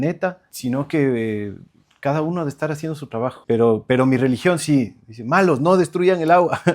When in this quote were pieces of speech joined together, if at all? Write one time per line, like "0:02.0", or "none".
0:03.4